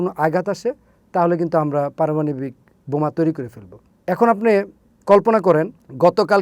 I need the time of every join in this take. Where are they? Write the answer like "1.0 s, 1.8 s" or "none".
none

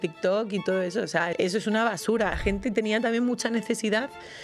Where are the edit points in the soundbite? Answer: 1.3 s, 2.4 s

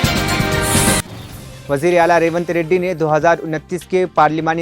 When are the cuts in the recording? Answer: 1.0 s

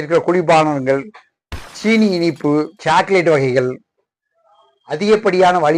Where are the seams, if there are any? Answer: 2.7 s

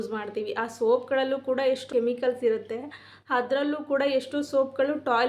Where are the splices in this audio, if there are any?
1.8 s

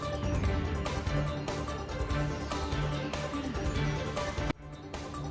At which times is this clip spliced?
2.3 s

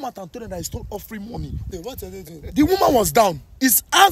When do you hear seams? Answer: 1.6 s

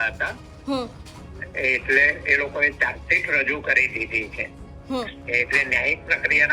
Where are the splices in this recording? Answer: none

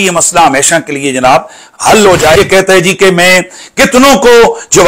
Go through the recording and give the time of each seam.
2.4 s

